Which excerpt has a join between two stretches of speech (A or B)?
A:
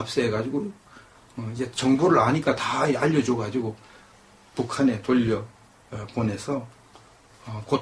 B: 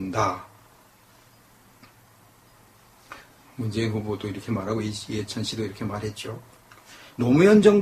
B